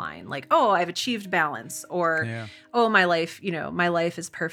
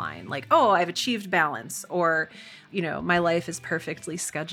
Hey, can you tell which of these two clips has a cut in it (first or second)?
second